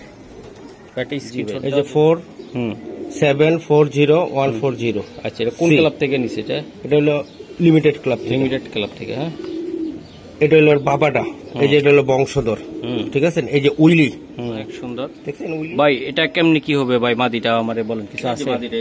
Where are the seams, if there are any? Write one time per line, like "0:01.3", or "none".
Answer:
0:01.3
0:15.2